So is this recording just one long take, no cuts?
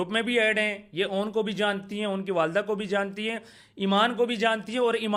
yes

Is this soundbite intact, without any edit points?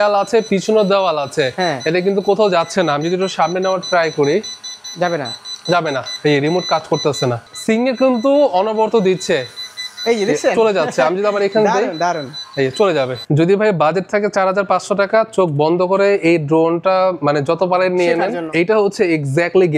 no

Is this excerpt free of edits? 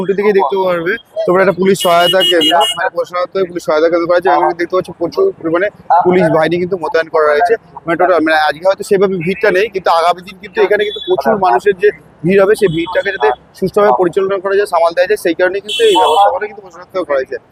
yes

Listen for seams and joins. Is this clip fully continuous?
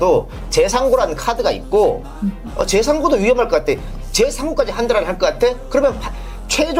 yes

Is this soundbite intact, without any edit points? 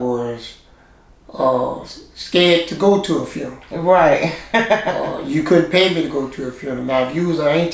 yes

